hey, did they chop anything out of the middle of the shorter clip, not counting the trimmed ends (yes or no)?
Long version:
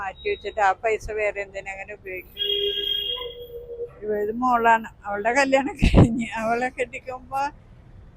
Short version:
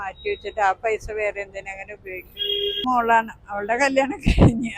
yes